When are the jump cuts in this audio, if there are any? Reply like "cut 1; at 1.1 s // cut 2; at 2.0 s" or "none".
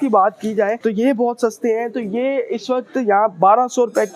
none

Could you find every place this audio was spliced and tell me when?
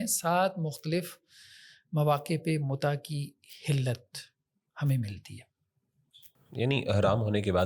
none

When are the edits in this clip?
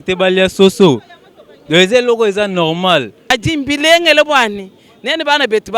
cut 1; at 3.2 s

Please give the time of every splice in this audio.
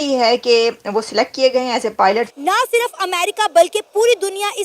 cut 1; at 2.3 s

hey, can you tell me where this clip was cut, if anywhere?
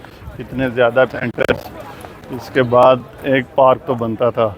cut 1; at 1.1 s

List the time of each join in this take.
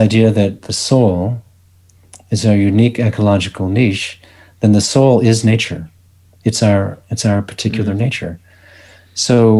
none

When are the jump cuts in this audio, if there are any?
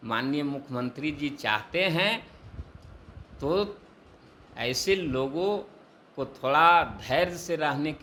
none

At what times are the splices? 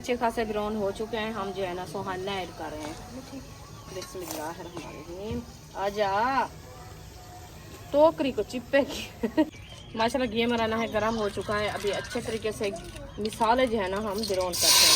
cut 1; at 9.5 s

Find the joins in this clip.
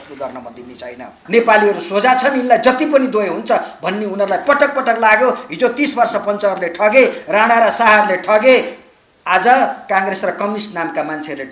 cut 1; at 1.2 s

